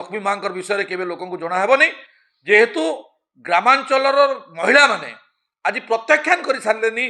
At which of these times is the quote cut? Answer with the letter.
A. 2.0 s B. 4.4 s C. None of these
C